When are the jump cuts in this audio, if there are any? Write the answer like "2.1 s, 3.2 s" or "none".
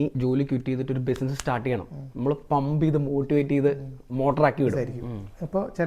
4.8 s